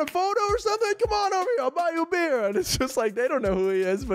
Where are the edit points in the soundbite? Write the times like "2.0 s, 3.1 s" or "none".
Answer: none

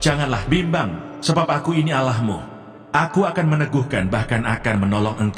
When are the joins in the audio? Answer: none

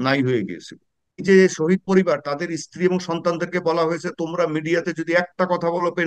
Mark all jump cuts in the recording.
1.2 s

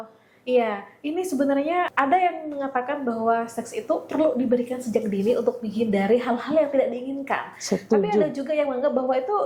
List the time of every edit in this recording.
1.9 s

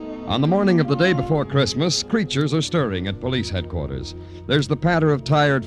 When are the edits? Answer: 2.4 s

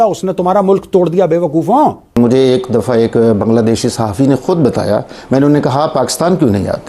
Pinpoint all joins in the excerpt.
2.2 s

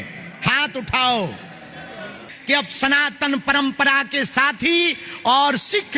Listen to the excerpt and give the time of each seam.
2.3 s

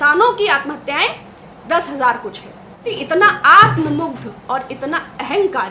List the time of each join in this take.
2.9 s

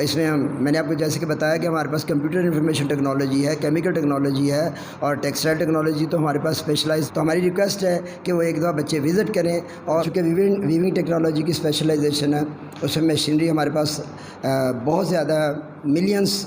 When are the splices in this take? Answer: 7.1 s, 10.1 s

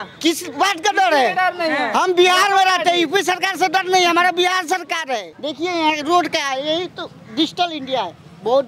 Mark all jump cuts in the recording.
5.3 s

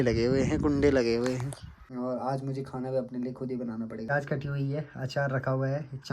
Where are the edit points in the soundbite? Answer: 1.8 s, 4.1 s

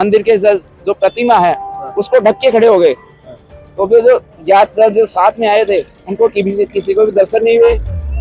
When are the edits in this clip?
none

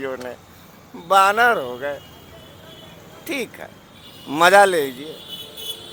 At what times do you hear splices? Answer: none

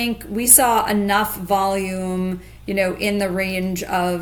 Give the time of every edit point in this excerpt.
none

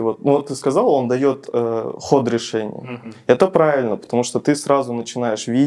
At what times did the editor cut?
none

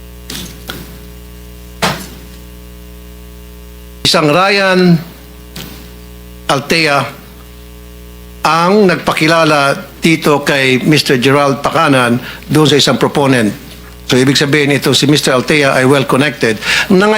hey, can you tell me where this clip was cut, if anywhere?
4.1 s

